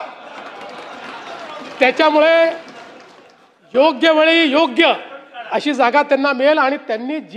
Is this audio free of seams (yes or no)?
yes